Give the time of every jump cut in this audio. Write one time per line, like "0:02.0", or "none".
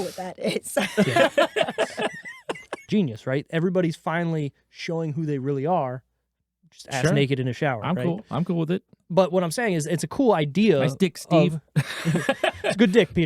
0:02.8